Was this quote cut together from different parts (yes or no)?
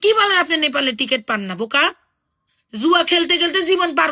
no